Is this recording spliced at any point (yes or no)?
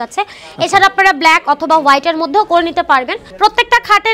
yes